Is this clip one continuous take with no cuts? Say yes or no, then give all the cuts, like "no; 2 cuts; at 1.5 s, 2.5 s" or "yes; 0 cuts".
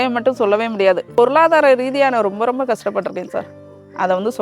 no; 1 cut; at 1.1 s